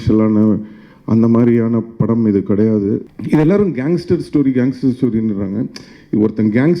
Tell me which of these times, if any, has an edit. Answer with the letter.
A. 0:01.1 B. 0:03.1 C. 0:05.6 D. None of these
B